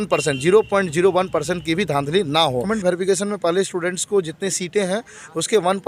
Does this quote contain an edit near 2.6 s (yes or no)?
yes